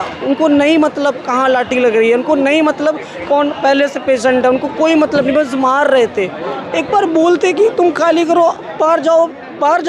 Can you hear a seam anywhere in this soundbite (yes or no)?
no